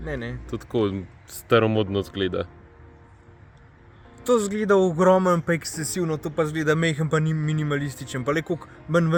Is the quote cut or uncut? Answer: uncut